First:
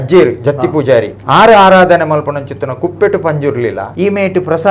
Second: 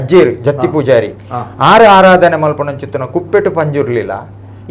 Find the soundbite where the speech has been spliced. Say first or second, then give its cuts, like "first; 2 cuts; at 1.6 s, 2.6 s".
first; 2 cuts; at 1.2 s, 3.9 s